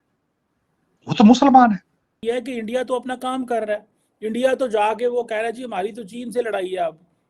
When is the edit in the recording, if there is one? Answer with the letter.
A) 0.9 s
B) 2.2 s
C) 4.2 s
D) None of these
B